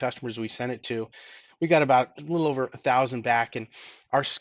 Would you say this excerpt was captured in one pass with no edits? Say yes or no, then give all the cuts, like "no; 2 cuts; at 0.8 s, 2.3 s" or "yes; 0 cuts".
no; 1 cut; at 2.1 s